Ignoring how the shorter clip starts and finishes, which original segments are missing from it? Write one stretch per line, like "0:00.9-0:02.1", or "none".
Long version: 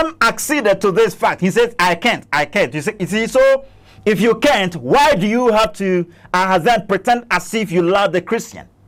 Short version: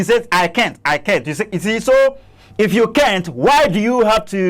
none